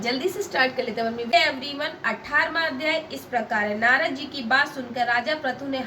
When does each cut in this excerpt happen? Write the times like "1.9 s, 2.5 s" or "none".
1.3 s